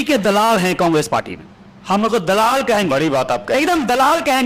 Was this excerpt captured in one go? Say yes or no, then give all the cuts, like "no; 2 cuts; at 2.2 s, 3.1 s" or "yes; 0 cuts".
yes; 0 cuts